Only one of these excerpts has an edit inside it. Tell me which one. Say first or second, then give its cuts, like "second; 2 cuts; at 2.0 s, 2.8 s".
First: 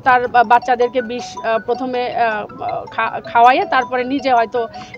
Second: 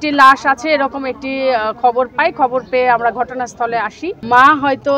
second; 1 cut; at 4.1 s